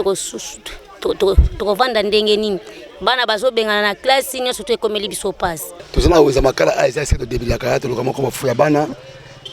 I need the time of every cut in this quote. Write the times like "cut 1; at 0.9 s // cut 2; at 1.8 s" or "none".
cut 1; at 5.8 s